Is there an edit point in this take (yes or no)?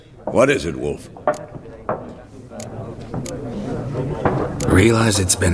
yes